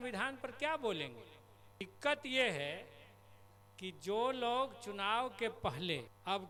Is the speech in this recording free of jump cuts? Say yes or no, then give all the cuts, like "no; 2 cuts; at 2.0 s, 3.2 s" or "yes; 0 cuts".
yes; 0 cuts